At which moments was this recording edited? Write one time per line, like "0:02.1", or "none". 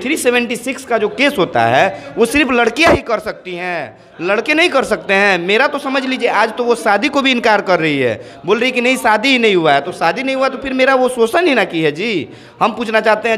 none